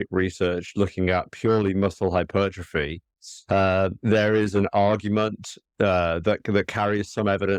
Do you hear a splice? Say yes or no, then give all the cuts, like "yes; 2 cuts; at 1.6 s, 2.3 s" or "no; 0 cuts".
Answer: no; 0 cuts